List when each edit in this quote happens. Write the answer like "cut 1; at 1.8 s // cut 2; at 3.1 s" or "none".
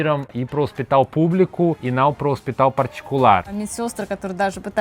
cut 1; at 1.8 s // cut 2; at 3.6 s